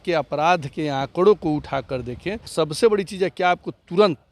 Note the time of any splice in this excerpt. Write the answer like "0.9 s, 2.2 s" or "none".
2.4 s